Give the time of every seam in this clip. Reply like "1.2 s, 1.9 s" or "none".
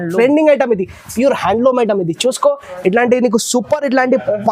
none